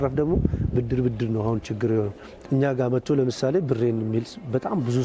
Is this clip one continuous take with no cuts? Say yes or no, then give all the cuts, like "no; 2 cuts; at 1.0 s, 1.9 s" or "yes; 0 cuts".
no; 1 cut; at 2.2 s